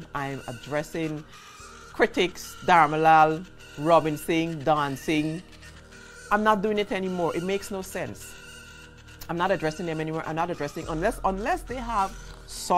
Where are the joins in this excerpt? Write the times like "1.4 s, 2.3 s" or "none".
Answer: none